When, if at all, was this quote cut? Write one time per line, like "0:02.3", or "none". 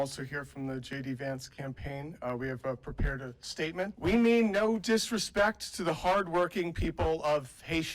0:03.9